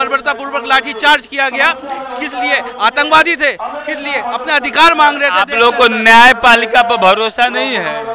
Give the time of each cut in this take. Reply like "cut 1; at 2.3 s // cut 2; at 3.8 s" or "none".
none

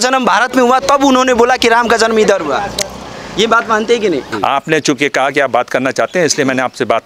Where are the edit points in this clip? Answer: cut 1; at 4.3 s

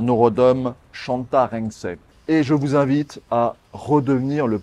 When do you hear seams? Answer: cut 1; at 2.1 s

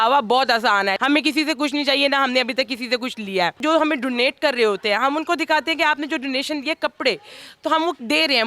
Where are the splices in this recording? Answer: cut 1; at 1.0 s // cut 2; at 3.6 s

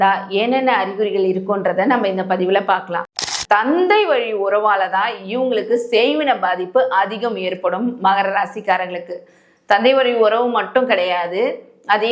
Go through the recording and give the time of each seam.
cut 1; at 3.1 s

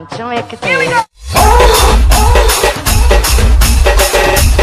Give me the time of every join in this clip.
none

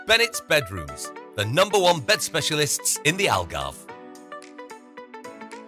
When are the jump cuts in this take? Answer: cut 1; at 3.7 s

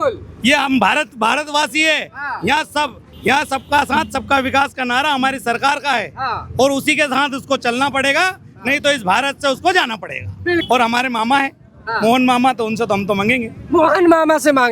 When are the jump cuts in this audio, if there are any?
cut 1; at 10.6 s

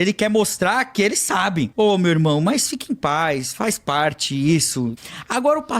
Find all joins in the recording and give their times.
cut 1; at 1.7 s // cut 2; at 5.0 s

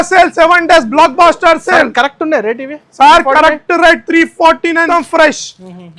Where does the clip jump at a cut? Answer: cut 1; at 4.9 s

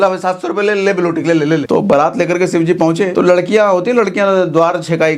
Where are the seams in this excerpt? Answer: cut 1; at 1.6 s // cut 2; at 3.1 s

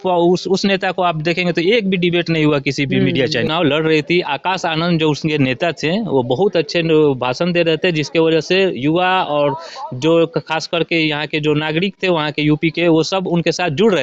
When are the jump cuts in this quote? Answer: cut 1; at 3.5 s

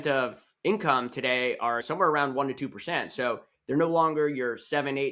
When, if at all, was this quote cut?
cut 1; at 1.8 s

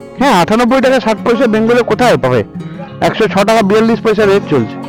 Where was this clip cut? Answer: none

